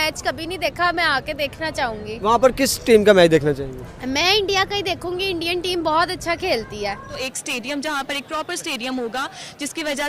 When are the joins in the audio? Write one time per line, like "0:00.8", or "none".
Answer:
0:07.2